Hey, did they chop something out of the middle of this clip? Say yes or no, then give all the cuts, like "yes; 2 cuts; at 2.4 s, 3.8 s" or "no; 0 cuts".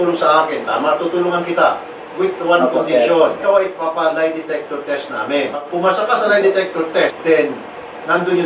yes; 3 cuts; at 3.4 s, 5.7 s, 7.2 s